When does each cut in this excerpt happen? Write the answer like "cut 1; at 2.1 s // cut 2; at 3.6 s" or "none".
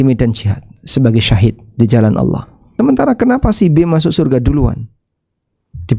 cut 1; at 2.7 s